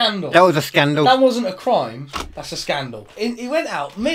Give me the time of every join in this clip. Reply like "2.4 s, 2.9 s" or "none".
3.0 s